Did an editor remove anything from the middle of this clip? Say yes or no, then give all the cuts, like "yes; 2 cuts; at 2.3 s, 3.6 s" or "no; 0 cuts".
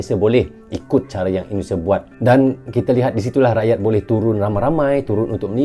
yes; 1 cut; at 2.1 s